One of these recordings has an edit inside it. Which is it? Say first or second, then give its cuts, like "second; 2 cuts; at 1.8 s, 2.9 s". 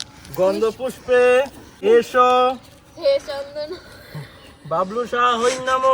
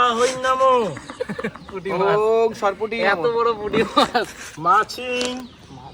first; 1 cut; at 1.6 s